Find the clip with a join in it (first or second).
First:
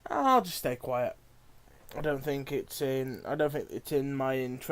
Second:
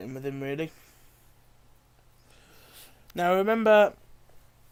first